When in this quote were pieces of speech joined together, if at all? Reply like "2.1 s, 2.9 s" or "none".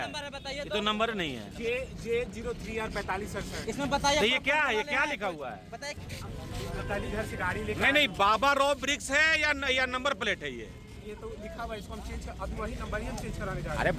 6.0 s